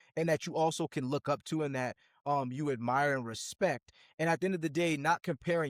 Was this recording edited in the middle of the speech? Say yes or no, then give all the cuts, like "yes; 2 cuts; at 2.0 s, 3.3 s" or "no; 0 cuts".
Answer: no; 0 cuts